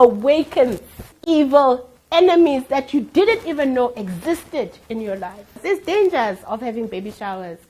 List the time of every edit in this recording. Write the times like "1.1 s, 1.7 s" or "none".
1.1 s, 5.6 s